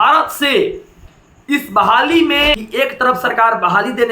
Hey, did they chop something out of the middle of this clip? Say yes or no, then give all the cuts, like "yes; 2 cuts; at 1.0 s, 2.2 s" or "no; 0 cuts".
yes; 1 cut; at 2.6 s